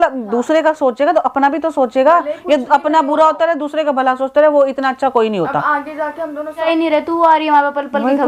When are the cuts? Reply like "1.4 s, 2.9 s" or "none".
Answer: 6.6 s